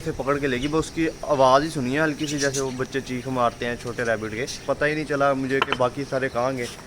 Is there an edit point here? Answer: yes; 1 cut; at 4.6 s

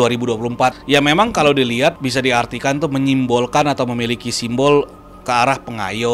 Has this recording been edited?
yes; 2 cuts; at 0.8 s, 2.0 s

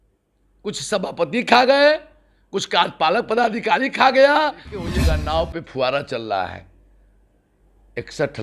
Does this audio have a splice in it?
yes; 1 cut; at 5.0 s

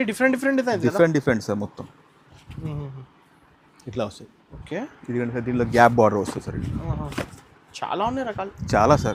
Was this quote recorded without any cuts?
yes; 0 cuts

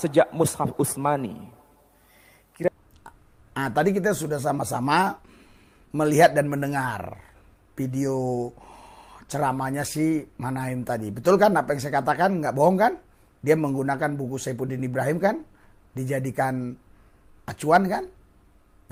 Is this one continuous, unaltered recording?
yes; 0 cuts

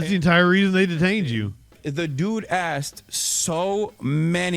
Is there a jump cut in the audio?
yes; 1 cut; at 1.8 s

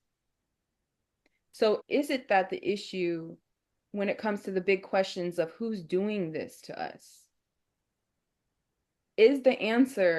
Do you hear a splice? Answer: no; 0 cuts

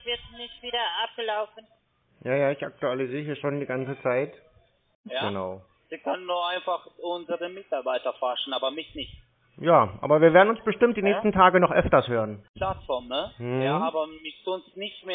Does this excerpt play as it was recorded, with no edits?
no; 2 cuts; at 5.1 s, 12.5 s

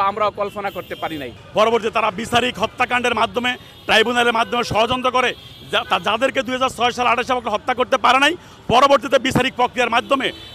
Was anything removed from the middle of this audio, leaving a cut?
yes; 1 cut; at 1.4 s

